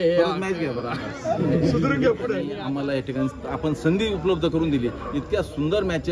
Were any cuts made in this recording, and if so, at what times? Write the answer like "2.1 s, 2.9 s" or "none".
2.5 s